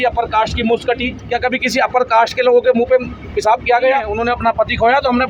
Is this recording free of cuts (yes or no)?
no